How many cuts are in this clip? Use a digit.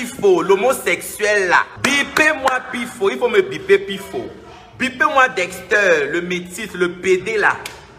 1